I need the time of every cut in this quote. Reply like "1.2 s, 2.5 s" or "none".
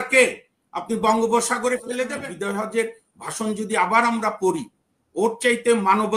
2.1 s